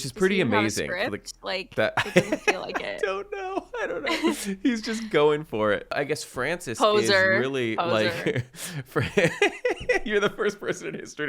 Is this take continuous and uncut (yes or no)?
no